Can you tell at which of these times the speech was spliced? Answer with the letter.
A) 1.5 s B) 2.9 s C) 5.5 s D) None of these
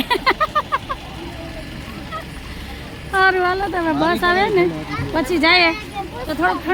D